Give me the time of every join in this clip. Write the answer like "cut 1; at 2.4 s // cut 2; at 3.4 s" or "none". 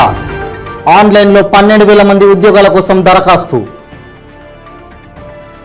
none